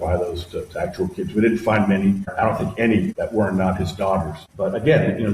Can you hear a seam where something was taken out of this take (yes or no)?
yes